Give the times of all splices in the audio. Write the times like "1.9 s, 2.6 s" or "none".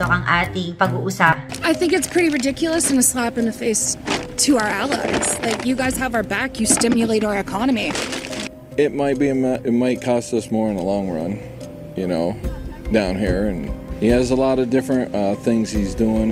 1.4 s